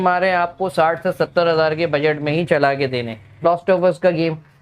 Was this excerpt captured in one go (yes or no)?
no